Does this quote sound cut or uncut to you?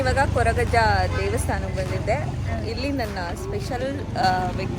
uncut